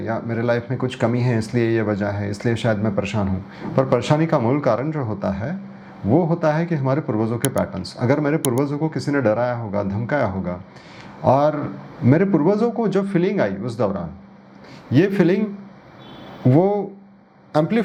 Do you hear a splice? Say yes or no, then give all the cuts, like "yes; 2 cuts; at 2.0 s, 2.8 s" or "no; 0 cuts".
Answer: no; 0 cuts